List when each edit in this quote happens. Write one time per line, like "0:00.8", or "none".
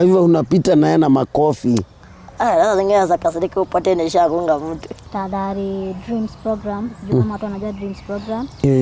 0:04.9